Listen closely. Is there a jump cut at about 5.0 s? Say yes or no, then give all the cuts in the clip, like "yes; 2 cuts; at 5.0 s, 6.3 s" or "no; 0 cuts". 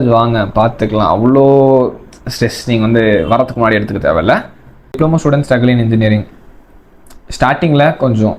yes; 1 cut; at 5.0 s